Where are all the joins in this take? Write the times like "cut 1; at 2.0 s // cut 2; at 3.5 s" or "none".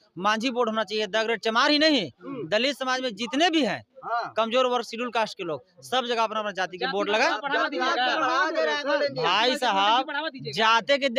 none